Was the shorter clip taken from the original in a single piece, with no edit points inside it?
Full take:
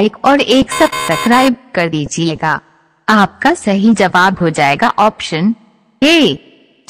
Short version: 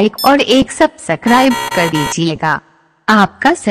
yes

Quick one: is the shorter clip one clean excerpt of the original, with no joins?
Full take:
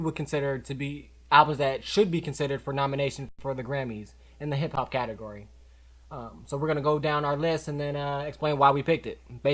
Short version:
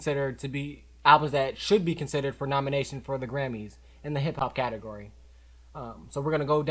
no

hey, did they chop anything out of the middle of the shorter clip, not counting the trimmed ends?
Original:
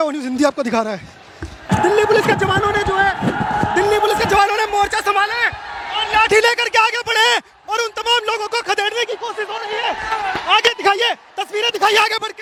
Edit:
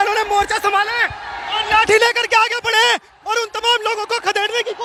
no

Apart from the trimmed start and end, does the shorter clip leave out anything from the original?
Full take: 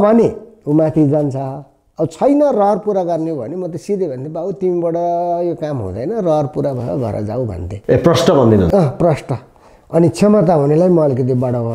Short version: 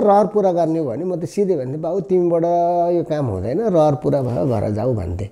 no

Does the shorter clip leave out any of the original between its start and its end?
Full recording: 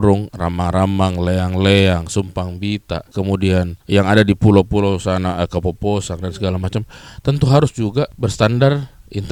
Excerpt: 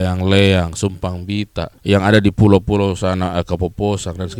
yes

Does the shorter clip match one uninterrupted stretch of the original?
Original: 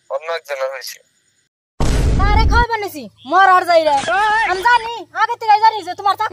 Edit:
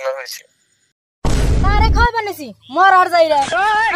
yes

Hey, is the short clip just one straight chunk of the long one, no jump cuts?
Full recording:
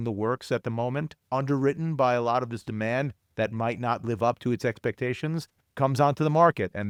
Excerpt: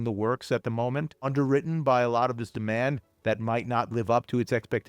no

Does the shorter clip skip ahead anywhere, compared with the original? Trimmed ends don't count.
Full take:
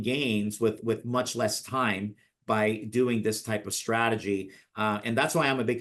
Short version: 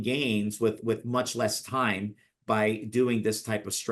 no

